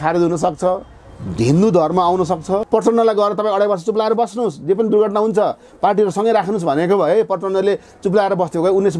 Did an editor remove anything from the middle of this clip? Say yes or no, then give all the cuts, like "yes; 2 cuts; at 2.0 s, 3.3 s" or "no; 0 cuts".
yes; 1 cut; at 2.6 s